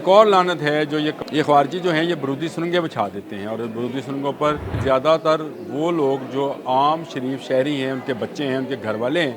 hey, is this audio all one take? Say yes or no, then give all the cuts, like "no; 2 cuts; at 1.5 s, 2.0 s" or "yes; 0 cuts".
no; 2 cuts; at 1.2 s, 4.8 s